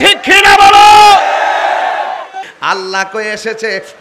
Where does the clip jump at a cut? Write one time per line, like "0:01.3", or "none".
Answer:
0:02.5